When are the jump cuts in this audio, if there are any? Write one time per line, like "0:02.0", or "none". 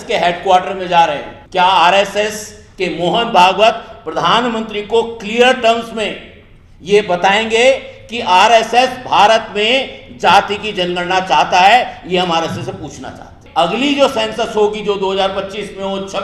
0:01.3
0:13.4